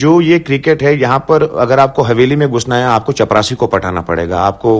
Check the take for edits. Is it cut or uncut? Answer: uncut